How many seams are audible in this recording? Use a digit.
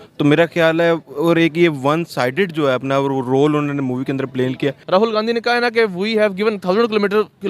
1